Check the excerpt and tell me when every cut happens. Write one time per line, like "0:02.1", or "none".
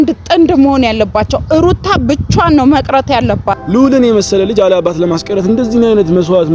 0:03.5